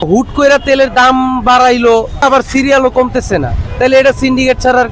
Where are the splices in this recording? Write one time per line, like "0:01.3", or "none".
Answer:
0:02.2
0:03.6